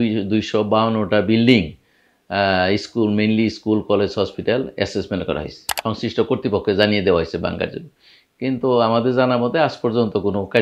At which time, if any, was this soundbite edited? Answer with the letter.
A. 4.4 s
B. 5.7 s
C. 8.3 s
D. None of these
B